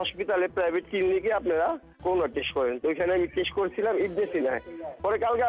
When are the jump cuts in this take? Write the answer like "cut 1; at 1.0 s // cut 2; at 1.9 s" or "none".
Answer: none